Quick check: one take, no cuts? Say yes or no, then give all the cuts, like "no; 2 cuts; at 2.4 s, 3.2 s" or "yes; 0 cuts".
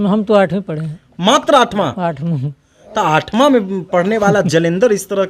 yes; 0 cuts